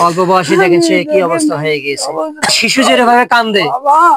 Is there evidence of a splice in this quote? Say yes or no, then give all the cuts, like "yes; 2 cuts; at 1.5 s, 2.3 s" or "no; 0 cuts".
yes; 1 cut; at 2.5 s